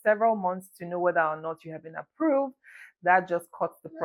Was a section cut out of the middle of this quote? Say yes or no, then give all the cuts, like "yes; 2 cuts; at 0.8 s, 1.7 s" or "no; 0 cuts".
no; 0 cuts